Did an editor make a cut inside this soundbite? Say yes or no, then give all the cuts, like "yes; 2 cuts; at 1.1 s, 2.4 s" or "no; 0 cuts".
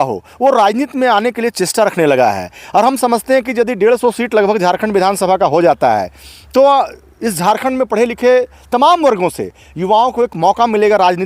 no; 0 cuts